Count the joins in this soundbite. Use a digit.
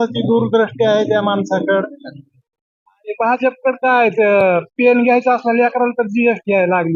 0